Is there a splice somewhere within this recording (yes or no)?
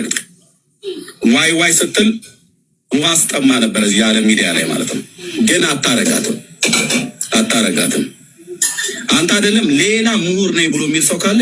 no